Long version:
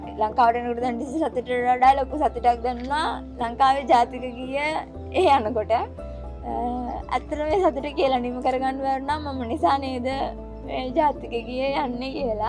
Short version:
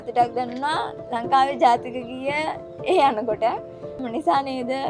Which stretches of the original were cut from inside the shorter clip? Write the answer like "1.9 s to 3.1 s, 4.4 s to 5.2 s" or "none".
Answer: 6.3 s to 9.3 s

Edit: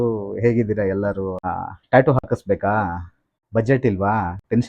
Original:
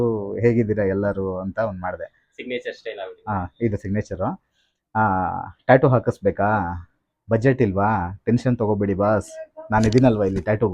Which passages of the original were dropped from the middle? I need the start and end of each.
1.4 s to 5.2 s

